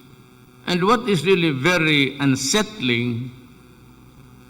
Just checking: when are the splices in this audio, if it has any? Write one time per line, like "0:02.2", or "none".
0:02.4